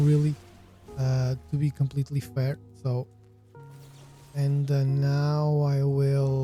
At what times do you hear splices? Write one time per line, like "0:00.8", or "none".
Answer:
none